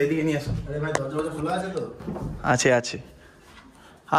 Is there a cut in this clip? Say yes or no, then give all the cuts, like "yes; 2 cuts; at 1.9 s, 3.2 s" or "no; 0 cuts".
no; 0 cuts